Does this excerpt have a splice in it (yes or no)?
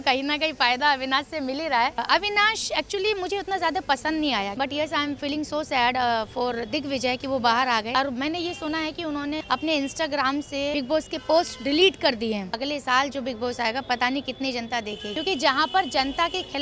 yes